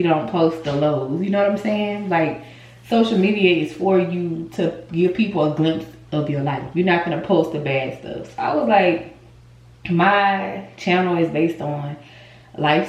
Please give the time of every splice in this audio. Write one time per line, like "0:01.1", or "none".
none